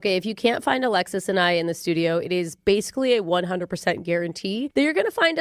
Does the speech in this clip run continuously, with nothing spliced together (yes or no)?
yes